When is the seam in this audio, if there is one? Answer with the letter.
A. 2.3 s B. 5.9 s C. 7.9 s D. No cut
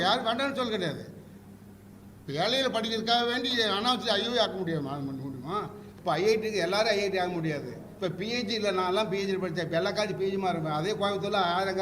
B